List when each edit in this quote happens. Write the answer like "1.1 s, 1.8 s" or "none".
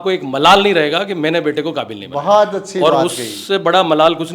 none